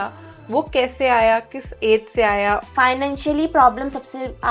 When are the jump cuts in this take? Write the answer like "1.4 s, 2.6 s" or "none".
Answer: 2.6 s